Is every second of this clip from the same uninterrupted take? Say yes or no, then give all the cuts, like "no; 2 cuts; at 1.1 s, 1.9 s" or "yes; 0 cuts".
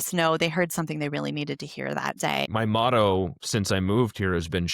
no; 1 cut; at 2.5 s